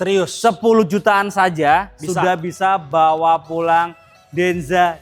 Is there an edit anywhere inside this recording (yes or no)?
no